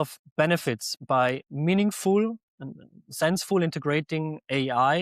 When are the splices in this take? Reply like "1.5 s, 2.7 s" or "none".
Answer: 0.9 s